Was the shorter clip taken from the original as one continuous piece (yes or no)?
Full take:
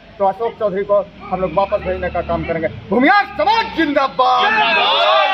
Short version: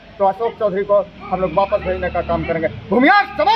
yes